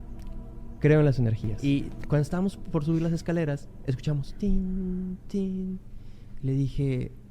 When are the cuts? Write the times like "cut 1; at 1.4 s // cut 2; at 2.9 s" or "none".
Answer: cut 1; at 1.5 s